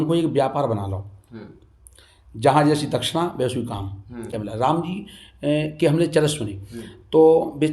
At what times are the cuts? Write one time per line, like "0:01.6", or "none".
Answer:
0:04.4